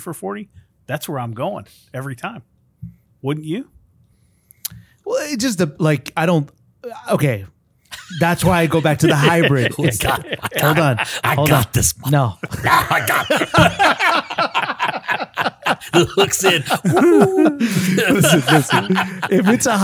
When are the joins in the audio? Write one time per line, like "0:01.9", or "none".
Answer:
none